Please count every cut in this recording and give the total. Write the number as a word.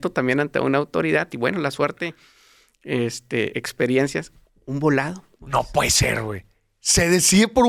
zero